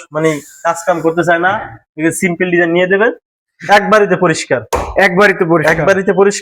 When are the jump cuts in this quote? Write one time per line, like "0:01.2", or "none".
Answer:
none